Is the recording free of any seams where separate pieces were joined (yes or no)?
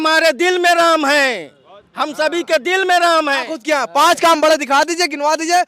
no